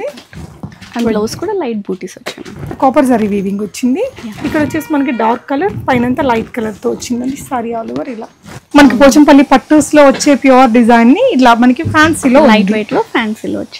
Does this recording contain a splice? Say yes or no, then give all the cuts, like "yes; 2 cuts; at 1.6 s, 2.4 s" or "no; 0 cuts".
yes; 2 cuts; at 2.8 s, 8.6 s